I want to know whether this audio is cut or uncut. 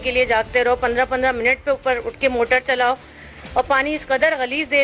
uncut